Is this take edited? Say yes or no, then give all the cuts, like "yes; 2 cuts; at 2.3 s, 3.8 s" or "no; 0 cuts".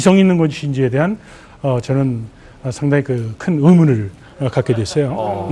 yes; 1 cut; at 3.8 s